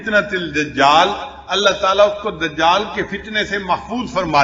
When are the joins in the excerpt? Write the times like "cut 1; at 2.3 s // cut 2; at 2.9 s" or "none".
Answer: none